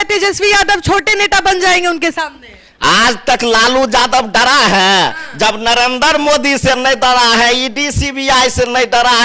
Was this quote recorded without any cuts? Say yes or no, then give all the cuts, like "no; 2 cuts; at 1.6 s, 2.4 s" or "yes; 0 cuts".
yes; 0 cuts